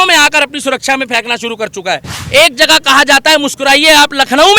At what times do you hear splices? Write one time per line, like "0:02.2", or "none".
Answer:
0:02.1